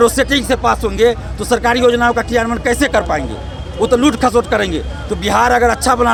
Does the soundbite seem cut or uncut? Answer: uncut